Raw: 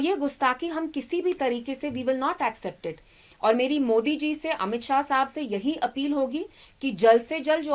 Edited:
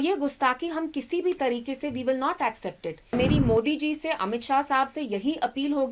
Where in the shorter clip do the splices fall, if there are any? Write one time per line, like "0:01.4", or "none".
0:03.1